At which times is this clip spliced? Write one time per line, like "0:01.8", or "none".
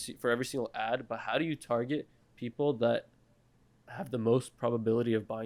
none